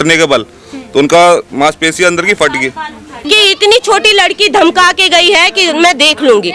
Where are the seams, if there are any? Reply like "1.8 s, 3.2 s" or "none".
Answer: 3.3 s